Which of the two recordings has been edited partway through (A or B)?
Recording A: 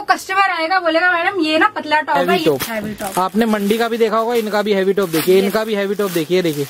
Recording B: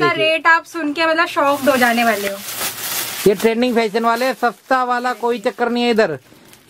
A